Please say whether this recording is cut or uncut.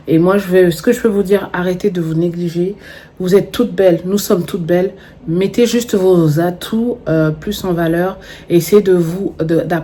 uncut